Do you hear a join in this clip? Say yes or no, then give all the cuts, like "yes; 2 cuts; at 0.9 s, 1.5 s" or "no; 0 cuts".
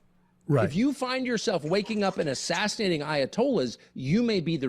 no; 0 cuts